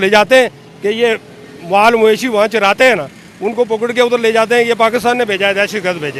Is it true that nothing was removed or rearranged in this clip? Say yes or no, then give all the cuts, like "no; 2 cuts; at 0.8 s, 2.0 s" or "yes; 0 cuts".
yes; 0 cuts